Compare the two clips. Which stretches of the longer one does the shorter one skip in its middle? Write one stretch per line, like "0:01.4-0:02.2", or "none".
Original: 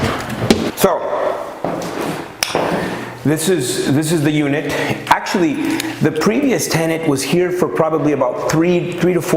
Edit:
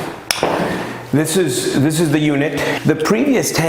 0:04.9-0:05.9